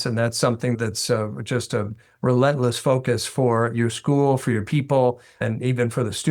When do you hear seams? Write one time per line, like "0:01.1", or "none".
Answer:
0:00.7
0:05.4